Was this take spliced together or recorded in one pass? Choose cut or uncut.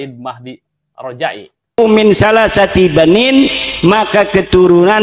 cut